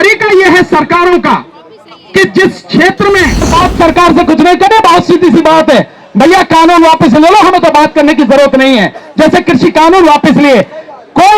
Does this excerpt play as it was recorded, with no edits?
no; 1 cut; at 3.5 s

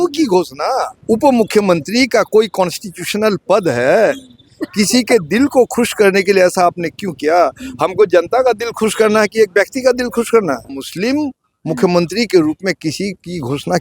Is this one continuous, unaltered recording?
no; 2 cuts; at 0.9 s, 10.7 s

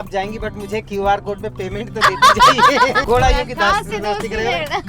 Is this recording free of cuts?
no; 1 cut; at 3.0 s

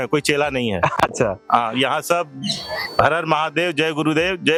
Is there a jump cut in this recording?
no; 0 cuts

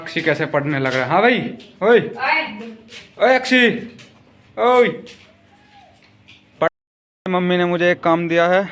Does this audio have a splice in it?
yes; 1 cut; at 6.7 s

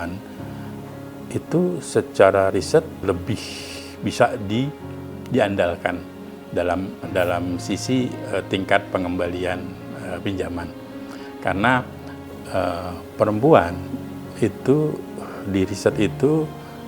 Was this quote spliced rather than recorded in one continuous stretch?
yes; 1 cut; at 3.0 s

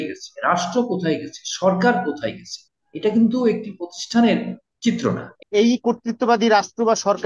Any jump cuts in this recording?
yes; 1 cut; at 5.4 s

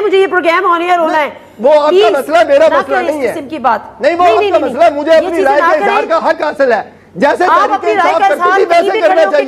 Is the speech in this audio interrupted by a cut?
no; 0 cuts

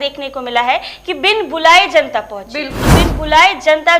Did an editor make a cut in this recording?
yes; 1 cut; at 2.8 s

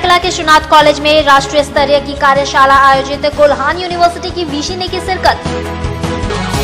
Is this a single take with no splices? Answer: yes; 0 cuts

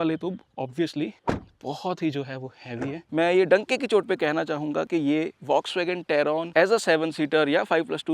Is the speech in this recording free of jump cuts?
no; 1 cut; at 3.0 s

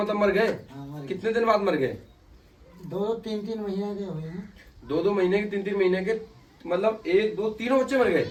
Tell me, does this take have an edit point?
no; 0 cuts

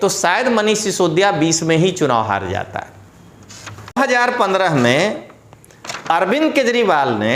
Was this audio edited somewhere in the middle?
yes; 1 cut; at 4.0 s

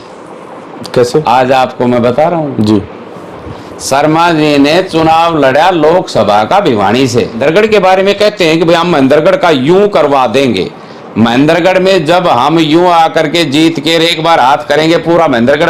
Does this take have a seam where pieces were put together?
yes; 1 cut; at 7.4 s

